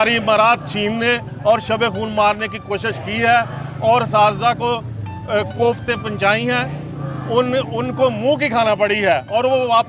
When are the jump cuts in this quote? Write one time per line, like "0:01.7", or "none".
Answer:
none